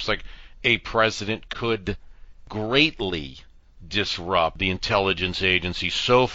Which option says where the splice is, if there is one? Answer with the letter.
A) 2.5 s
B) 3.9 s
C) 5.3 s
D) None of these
A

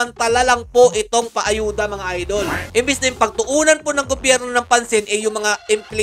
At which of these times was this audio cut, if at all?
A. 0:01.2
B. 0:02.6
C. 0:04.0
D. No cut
B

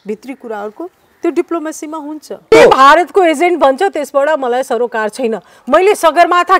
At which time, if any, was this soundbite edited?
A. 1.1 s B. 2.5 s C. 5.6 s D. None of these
B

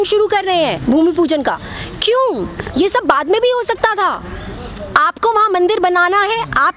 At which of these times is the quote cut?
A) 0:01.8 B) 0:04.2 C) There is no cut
C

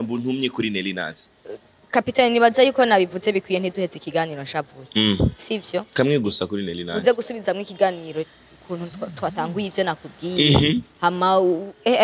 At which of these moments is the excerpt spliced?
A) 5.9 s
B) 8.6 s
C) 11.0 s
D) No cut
D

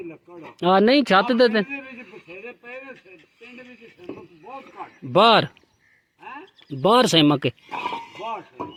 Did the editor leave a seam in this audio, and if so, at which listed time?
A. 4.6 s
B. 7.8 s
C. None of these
C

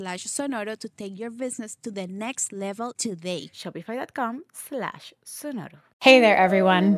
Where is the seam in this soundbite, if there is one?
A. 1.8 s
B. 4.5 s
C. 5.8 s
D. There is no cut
C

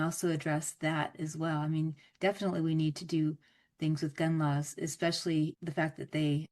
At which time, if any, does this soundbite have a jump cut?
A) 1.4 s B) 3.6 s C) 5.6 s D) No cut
C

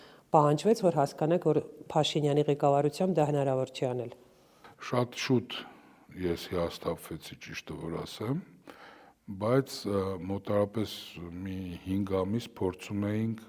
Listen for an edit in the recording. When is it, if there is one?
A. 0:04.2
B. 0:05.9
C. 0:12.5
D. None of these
D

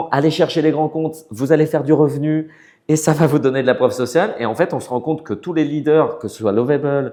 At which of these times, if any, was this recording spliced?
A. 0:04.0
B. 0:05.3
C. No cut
C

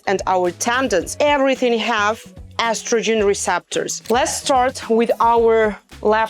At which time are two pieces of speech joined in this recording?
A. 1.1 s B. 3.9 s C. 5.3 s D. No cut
B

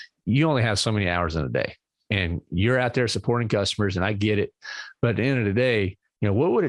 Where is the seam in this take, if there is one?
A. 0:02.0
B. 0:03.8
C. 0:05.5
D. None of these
A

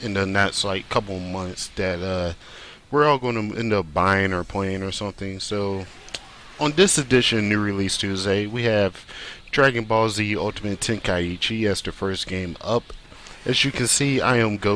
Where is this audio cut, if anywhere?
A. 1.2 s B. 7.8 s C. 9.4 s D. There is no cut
A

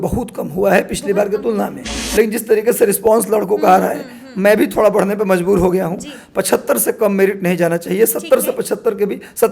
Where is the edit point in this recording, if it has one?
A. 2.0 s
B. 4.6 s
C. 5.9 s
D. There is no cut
A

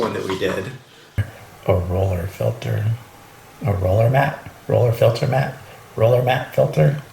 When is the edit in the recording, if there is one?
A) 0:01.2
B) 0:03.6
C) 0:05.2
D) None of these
A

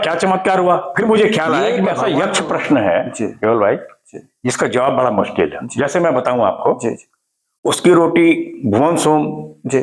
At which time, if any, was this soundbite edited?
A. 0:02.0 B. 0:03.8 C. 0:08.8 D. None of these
A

